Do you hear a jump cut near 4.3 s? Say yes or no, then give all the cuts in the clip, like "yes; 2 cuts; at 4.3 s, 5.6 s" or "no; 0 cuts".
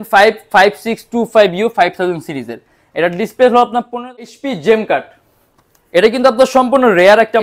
yes; 1 cut; at 4.3 s